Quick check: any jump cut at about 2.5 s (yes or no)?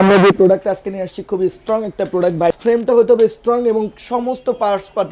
yes